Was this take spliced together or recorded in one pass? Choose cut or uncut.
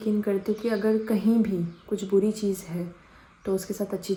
uncut